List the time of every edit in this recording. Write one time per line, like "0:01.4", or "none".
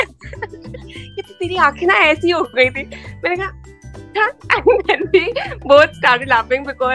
none

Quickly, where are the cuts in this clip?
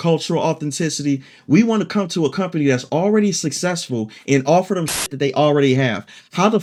none

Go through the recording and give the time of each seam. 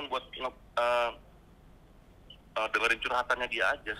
none

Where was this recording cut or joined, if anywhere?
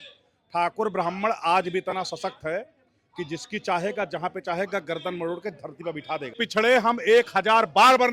0:06.4

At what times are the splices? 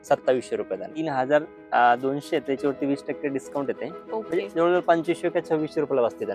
0:00.9

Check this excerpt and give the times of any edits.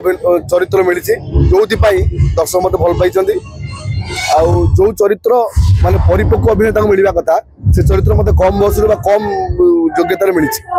none

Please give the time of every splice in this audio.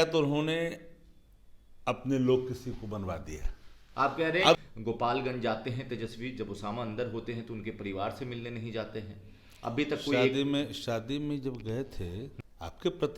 0:04.6
0:12.3

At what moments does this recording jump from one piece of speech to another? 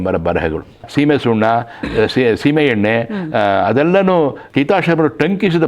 0:00.9
0:04.4

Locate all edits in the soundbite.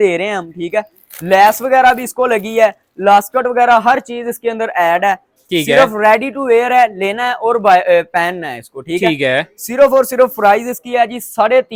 none

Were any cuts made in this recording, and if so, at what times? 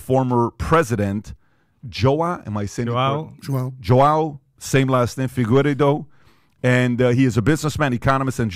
none

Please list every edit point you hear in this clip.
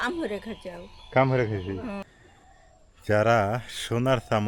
0:02.0

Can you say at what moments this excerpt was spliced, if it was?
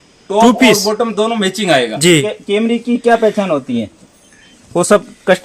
0:02.2

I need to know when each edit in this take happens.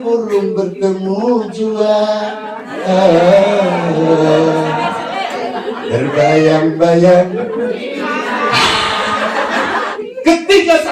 0:09.9

